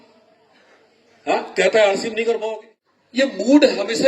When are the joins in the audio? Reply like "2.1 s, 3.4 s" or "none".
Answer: 2.8 s